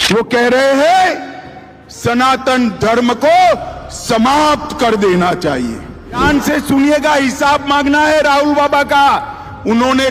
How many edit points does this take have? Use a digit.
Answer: 1